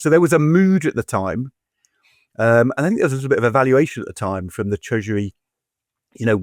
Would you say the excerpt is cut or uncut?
uncut